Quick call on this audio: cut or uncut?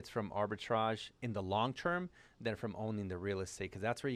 uncut